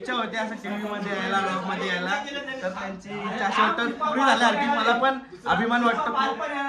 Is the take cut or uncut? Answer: uncut